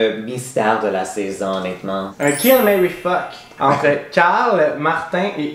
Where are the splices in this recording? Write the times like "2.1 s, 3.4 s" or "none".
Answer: 2.1 s, 3.5 s